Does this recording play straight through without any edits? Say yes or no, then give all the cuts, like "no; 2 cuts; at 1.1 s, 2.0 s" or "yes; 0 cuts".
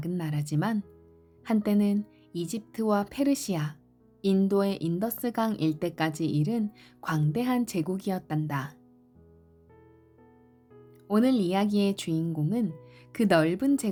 yes; 0 cuts